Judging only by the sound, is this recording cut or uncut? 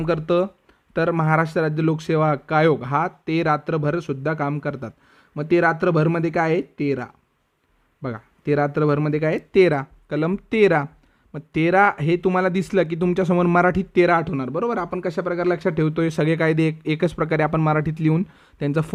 uncut